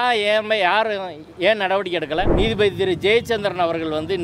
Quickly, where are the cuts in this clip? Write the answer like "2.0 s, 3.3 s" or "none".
2.3 s